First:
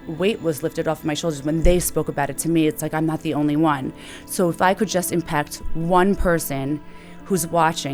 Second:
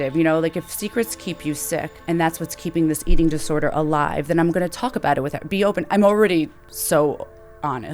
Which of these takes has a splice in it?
second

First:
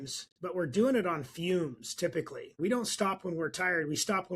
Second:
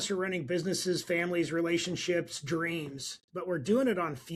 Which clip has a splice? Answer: first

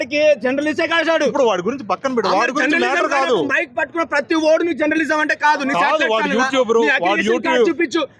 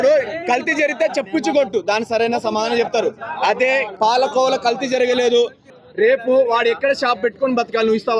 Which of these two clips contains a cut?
second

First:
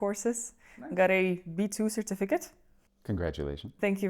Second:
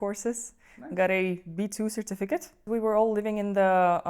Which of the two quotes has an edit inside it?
second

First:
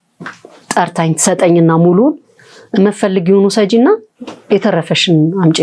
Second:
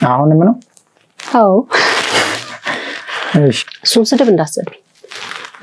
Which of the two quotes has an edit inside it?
second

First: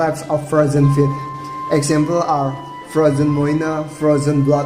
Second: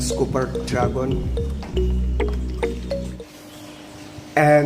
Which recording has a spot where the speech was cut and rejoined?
second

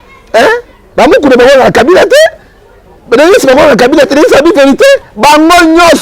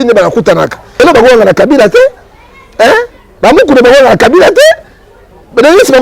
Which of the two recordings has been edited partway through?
second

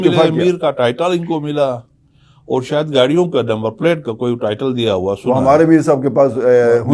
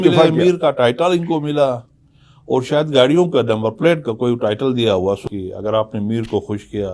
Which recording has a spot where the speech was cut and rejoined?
second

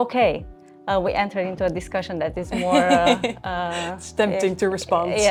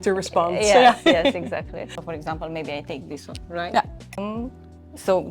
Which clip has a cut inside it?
second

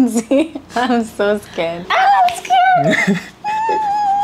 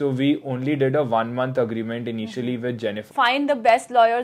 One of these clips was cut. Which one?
second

